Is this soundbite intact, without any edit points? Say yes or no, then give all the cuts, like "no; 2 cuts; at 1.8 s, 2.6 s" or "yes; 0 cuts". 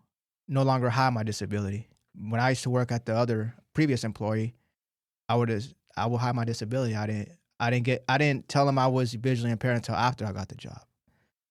yes; 0 cuts